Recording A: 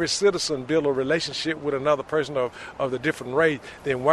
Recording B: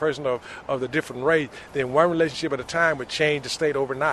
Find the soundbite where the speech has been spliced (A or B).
B